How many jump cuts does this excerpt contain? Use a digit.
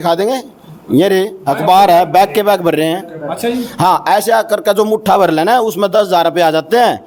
0